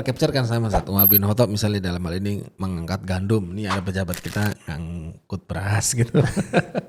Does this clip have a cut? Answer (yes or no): no